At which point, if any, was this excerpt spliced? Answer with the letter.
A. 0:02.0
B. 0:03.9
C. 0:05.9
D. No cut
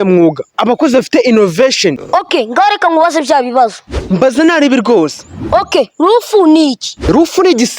A